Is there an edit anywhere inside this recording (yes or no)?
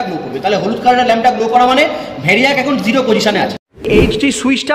yes